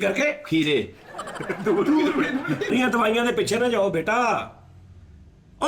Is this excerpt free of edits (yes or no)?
no